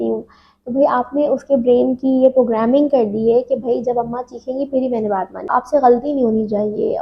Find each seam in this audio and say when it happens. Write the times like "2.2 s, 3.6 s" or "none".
5.5 s